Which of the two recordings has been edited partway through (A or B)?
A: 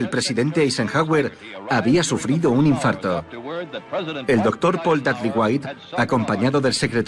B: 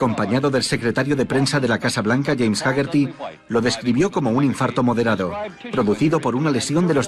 A